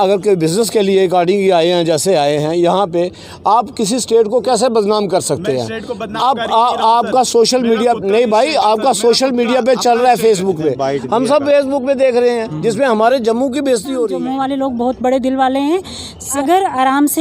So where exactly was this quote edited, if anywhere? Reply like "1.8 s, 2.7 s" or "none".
14.2 s, 16.3 s